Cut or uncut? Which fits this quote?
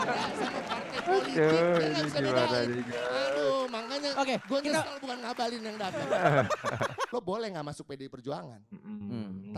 cut